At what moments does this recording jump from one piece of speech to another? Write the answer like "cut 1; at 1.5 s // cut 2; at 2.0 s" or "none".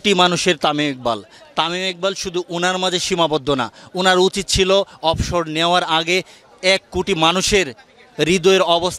none